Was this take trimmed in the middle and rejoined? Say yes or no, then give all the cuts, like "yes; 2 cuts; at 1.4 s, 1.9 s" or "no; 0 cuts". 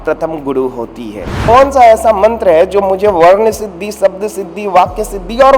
yes; 1 cut; at 1.3 s